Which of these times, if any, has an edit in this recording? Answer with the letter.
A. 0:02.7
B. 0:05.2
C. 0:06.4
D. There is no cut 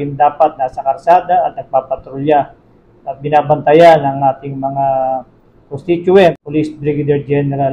C